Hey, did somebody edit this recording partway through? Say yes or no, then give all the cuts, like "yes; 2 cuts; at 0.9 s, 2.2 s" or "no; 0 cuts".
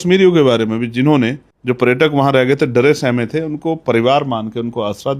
yes; 1 cut; at 1.5 s